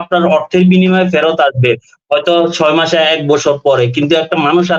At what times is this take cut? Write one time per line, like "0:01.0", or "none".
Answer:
none